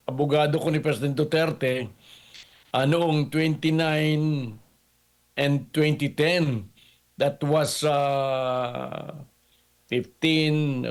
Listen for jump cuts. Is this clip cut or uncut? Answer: uncut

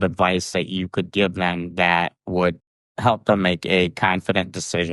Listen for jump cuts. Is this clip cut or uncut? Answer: uncut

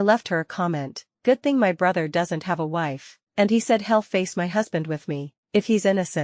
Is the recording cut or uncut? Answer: cut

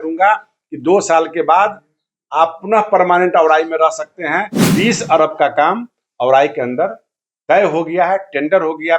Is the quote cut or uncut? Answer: cut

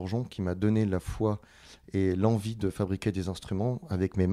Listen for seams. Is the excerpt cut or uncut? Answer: uncut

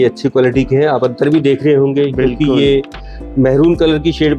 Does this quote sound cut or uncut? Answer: uncut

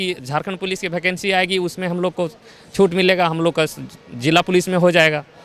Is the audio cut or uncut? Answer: uncut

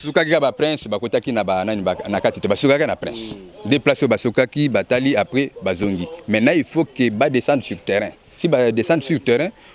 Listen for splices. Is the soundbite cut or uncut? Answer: uncut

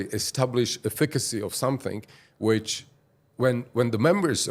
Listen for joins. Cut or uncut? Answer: uncut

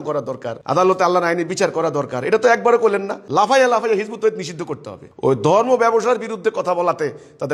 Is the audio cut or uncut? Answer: uncut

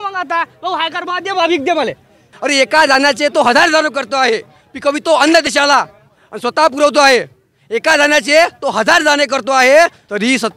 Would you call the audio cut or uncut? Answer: cut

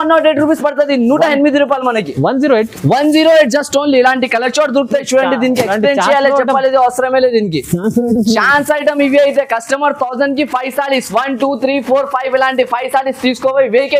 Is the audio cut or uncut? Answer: uncut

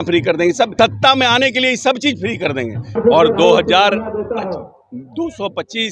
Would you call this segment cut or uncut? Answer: cut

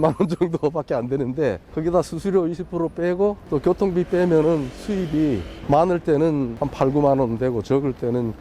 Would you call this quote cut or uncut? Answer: cut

